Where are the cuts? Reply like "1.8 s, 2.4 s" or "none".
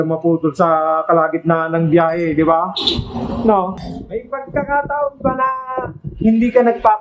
3.8 s